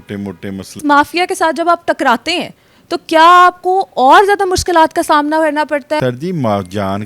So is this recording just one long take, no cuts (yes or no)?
no